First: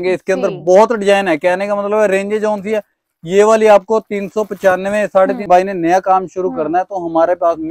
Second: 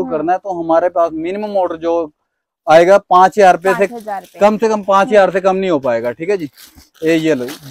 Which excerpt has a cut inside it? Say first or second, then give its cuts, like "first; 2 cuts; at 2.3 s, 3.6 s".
first; 1 cut; at 5.5 s